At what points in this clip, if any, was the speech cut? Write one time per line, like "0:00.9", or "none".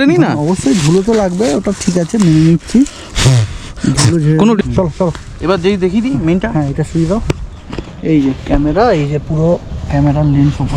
0:04.6